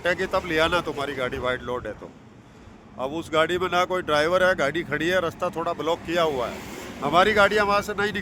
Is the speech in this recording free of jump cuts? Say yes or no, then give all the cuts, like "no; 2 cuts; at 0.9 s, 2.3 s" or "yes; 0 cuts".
yes; 0 cuts